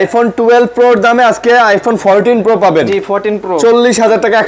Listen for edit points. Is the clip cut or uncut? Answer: uncut